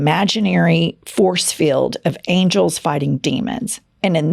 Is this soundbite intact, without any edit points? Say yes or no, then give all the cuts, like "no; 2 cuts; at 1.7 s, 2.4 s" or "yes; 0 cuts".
yes; 0 cuts